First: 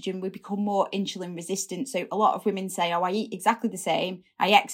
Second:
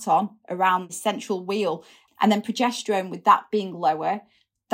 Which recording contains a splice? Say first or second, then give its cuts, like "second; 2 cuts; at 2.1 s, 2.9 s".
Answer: second; 2 cuts; at 0.9 s, 1.9 s